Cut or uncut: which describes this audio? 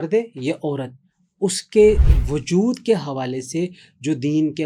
uncut